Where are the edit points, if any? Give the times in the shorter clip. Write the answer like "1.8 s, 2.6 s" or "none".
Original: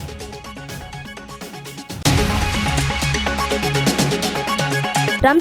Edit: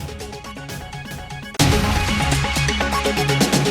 1.3 s